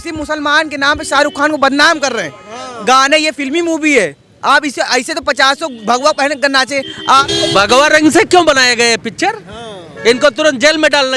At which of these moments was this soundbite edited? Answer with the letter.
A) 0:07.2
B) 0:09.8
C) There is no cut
A